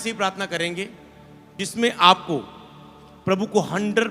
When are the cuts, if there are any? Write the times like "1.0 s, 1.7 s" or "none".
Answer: 1.6 s